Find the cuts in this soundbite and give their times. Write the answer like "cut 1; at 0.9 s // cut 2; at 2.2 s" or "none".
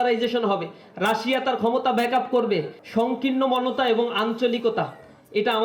cut 1; at 2.8 s